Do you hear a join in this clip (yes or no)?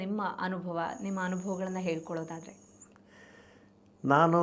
no